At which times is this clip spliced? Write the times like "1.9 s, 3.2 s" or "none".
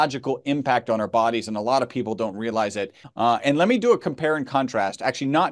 3.0 s